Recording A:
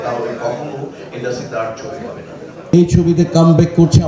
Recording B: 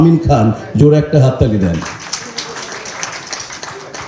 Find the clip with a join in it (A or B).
A